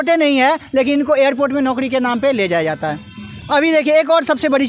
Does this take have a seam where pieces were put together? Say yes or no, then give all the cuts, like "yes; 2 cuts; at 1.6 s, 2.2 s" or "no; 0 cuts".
no; 0 cuts